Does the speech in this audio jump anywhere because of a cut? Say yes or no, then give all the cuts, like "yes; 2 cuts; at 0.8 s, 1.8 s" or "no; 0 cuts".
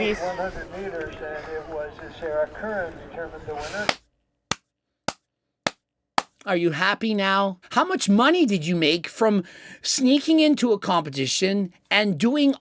yes; 2 cuts; at 3.8 s, 7.6 s